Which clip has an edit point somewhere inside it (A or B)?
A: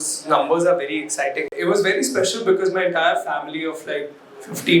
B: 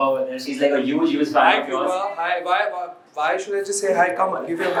A